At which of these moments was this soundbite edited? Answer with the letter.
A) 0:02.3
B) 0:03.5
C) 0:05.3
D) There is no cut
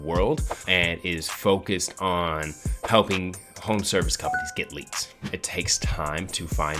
C